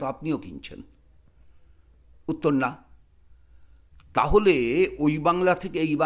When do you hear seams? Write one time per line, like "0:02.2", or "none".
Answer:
none